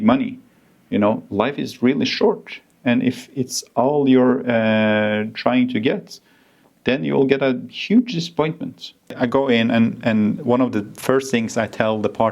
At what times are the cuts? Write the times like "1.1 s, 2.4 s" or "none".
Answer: 9.1 s